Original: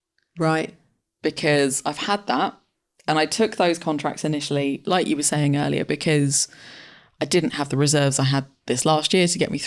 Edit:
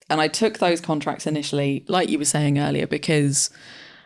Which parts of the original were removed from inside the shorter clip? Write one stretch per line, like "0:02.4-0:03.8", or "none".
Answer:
none